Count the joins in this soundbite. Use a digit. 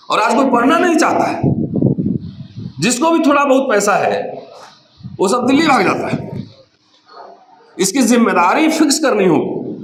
0